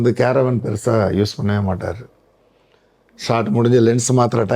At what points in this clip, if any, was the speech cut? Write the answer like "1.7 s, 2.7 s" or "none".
none